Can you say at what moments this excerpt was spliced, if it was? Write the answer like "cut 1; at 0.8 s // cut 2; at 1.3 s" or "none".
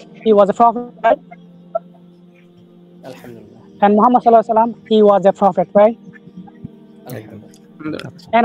none